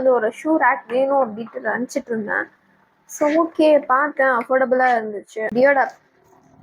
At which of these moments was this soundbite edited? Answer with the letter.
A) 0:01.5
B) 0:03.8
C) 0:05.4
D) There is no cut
C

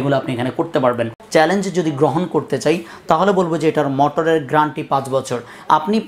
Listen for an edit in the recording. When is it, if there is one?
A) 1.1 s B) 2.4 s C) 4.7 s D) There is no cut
A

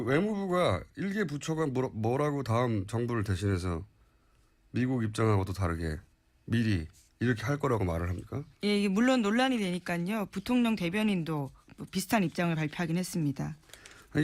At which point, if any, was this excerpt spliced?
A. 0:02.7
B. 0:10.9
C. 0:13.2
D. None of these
D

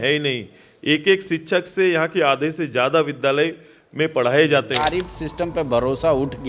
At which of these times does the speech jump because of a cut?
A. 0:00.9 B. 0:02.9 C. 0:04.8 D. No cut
C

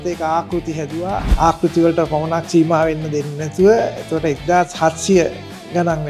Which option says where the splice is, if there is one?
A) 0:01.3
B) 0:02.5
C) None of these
A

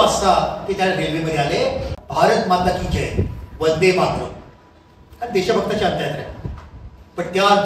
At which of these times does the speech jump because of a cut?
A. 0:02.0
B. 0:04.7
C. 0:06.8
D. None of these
A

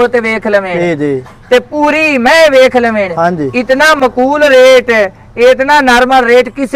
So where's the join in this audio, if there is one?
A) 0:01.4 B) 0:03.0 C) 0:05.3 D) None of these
D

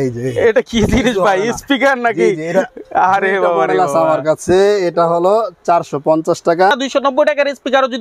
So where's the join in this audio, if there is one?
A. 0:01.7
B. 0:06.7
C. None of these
B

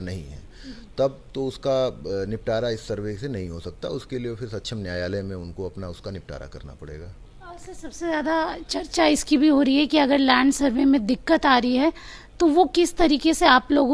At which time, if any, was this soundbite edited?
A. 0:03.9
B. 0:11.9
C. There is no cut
C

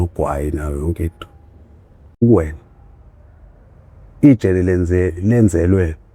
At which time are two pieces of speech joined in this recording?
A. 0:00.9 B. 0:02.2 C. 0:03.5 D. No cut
B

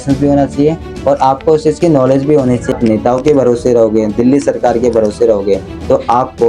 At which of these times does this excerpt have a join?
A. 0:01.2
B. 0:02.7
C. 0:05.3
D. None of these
B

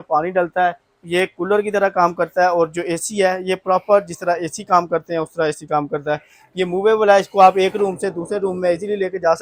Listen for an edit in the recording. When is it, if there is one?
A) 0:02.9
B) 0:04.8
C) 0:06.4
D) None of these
D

